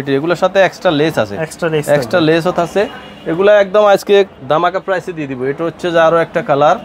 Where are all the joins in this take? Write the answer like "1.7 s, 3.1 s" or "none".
none